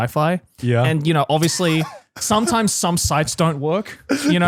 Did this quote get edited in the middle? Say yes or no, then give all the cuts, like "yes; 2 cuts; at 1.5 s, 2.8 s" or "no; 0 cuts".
no; 0 cuts